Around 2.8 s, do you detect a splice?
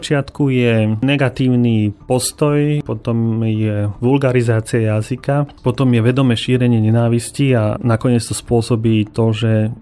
yes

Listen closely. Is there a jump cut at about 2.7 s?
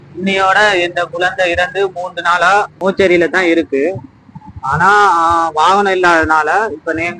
yes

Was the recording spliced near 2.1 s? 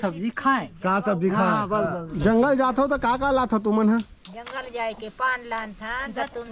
yes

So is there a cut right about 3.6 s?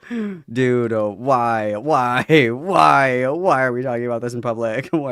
no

